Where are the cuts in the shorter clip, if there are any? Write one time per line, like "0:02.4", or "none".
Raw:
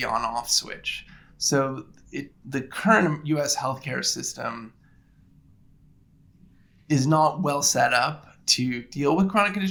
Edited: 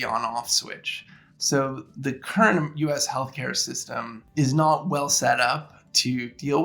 0:01.9
0:04.2